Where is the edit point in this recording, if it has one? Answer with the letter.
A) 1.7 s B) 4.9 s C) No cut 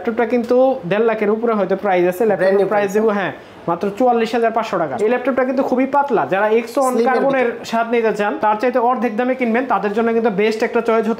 B